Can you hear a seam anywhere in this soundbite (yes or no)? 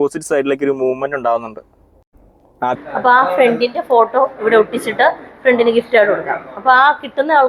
yes